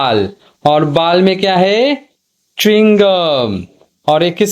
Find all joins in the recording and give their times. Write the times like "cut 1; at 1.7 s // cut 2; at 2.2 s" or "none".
none